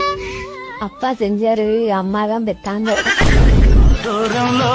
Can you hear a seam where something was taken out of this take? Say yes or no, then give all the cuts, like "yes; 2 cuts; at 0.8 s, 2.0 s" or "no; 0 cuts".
yes; 1 cut; at 3.1 s